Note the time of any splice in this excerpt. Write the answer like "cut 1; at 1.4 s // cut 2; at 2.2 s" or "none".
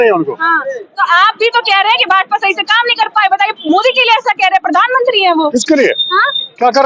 none

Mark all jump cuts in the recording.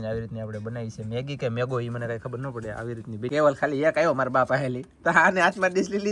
cut 1; at 3.3 s

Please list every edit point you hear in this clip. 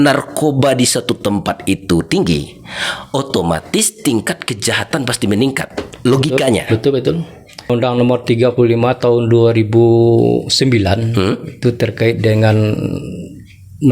cut 1; at 7.7 s

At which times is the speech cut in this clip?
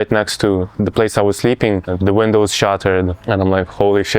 cut 1; at 1.9 s // cut 2; at 3.2 s

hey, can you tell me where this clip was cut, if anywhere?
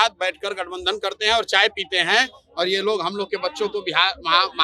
none

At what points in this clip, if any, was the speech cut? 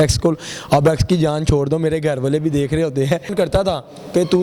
cut 1; at 3.3 s

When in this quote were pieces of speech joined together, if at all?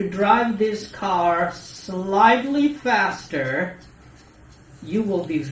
none

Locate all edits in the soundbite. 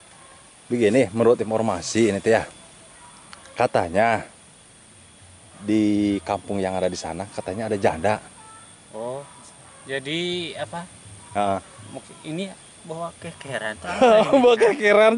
none

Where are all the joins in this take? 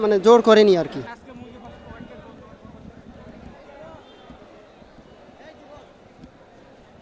none

